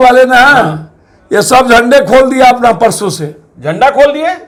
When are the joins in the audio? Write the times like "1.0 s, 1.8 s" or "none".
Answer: none